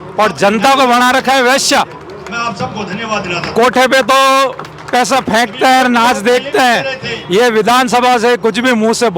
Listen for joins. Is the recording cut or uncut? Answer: uncut